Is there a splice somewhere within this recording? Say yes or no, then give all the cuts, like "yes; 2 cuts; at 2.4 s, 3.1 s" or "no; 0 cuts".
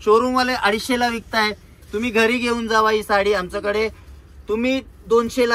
no; 0 cuts